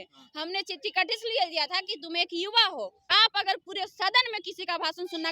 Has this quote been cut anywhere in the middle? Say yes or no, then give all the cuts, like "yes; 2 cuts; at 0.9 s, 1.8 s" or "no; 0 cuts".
yes; 1 cut; at 3.0 s